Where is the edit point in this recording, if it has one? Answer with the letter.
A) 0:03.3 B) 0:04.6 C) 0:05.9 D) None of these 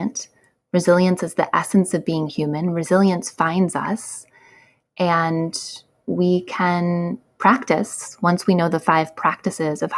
D